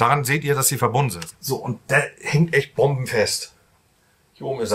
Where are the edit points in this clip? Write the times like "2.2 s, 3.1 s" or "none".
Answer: 1.2 s